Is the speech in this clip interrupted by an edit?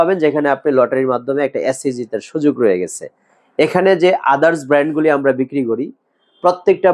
no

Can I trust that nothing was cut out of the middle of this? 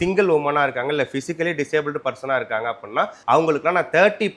yes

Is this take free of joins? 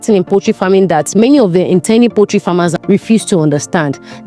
no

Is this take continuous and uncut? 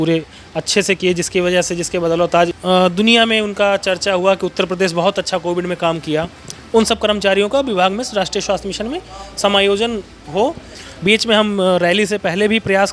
no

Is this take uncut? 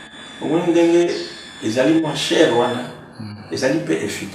yes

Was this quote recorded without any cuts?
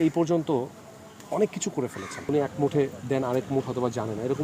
no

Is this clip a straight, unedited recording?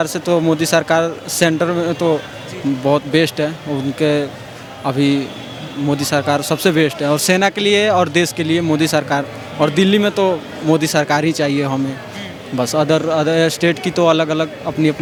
yes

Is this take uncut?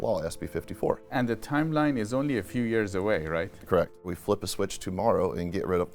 no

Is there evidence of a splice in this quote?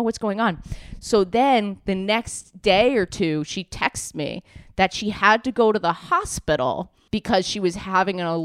yes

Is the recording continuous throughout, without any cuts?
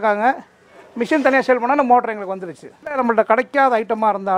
no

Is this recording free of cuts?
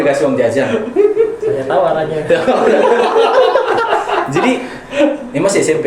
yes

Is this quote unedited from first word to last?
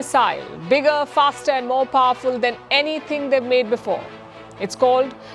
yes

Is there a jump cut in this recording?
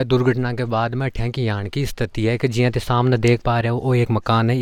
no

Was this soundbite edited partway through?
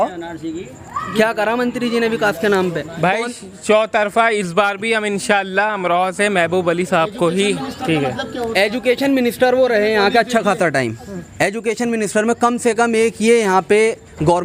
no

